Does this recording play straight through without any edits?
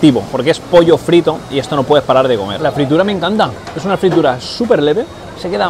no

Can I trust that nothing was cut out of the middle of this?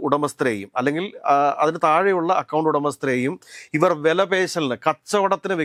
yes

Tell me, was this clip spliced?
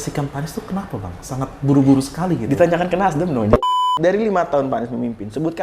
yes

